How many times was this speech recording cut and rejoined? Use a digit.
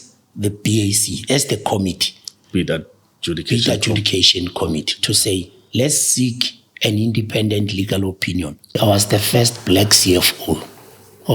1